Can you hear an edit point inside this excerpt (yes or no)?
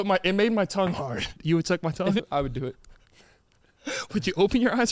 yes